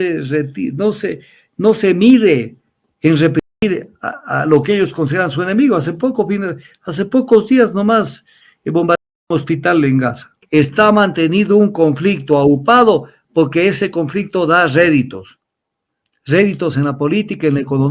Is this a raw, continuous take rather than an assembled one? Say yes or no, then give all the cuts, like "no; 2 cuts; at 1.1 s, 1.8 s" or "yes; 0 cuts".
no; 1 cut; at 10.4 s